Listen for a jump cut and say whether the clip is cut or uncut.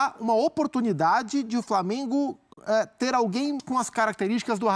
cut